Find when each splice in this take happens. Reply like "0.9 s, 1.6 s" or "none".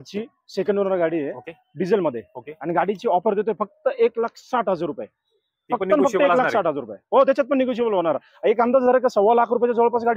none